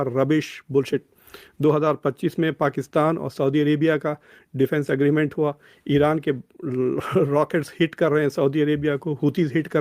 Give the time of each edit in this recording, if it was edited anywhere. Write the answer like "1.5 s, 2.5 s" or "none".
none